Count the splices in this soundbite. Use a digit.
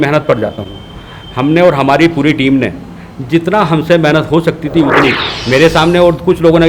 1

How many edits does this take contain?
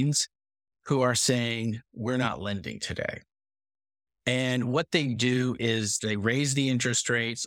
1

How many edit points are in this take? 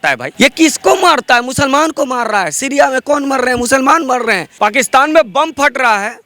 1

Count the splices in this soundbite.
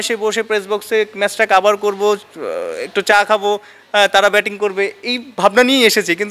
0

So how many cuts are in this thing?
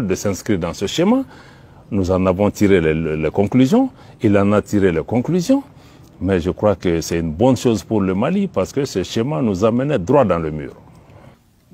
0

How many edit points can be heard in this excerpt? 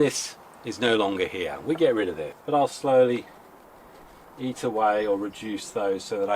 1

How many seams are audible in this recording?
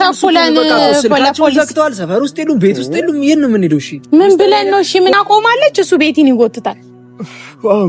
1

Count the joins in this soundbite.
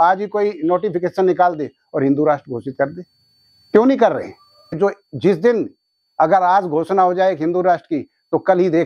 1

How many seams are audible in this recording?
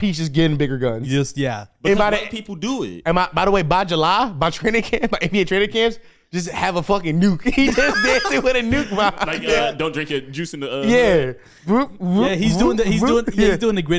0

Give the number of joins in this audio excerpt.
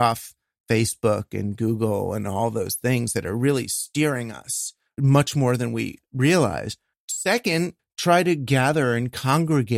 4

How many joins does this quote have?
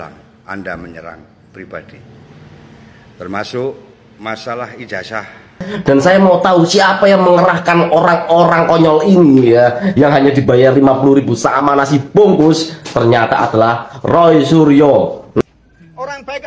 2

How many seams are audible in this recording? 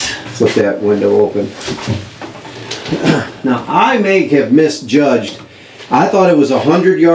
0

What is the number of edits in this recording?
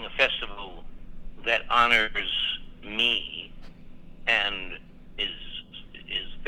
0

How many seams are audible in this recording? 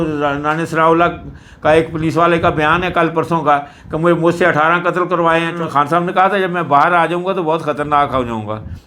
1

